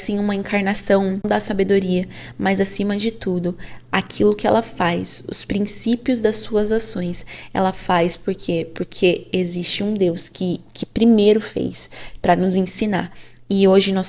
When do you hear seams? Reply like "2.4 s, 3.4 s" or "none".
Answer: 1.2 s